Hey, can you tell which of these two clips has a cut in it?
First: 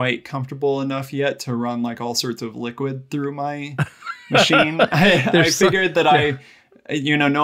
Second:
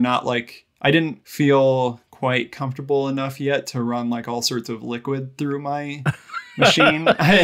second; 1 cut; at 1.2 s

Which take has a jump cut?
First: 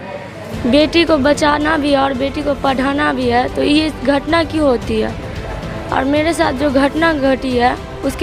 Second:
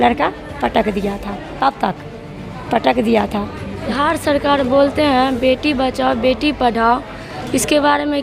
second; 1 cut; at 3.9 s

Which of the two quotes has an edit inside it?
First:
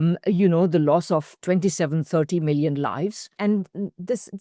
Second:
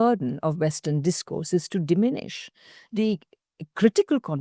first; 2 cuts; at 1.4 s, 3.4 s

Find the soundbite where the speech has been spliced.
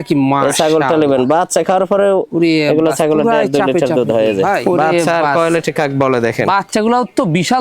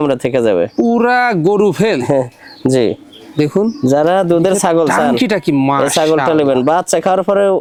first; 1 cut; at 4.6 s

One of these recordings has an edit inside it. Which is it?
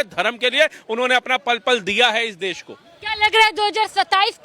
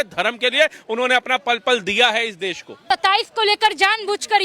second; 1 cut; at 2.8 s

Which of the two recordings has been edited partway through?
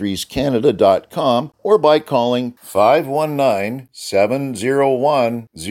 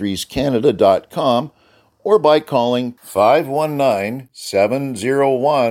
first; 1 cut; at 1.5 s

